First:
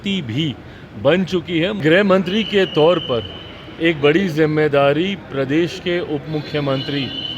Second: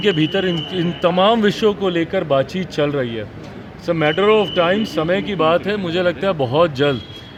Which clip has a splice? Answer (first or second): first